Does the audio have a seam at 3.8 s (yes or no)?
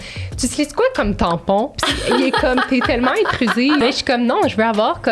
yes